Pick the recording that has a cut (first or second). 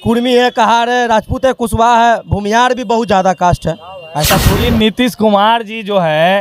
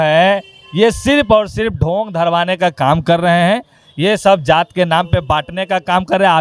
first